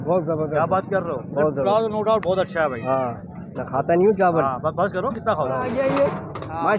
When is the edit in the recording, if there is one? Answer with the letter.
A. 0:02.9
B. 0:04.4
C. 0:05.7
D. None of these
C